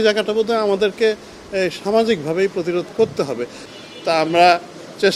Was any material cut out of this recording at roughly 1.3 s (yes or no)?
no